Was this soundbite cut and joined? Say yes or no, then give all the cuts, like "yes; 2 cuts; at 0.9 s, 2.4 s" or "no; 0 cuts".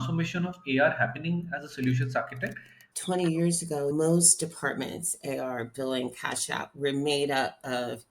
yes; 1 cut; at 2.9 s